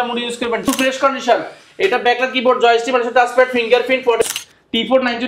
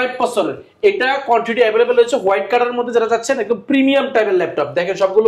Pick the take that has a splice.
first; 2 cuts; at 0.7 s, 4.3 s

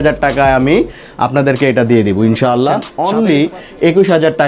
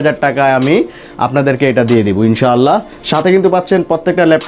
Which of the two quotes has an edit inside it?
first; 1 cut; at 2.9 s

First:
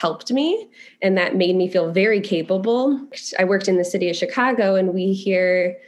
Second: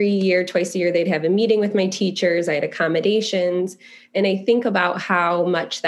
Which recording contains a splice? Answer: first; 1 cut; at 3.2 s

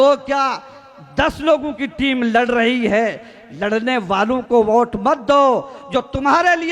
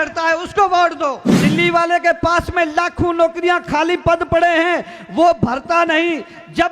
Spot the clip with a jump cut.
second; 1 cut; at 1.3 s

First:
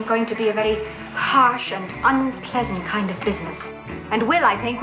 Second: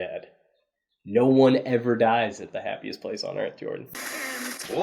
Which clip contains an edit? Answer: second; 1 cut; at 3.9 s

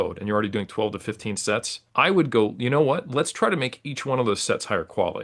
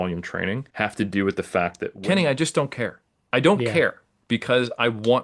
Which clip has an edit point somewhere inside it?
second; 2 cuts; at 1.9 s, 4.1 s

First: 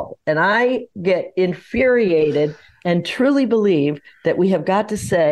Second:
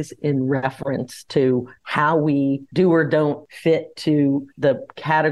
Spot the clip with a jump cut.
second; 4 cuts; at 1.8 s, 2.7 s, 3.5 s, 4.5 s

